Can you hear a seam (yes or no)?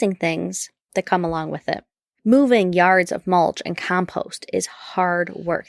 yes